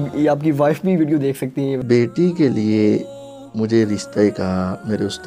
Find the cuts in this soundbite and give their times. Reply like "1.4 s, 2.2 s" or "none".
1.8 s